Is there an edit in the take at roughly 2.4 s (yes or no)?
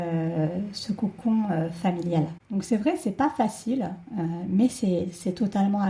yes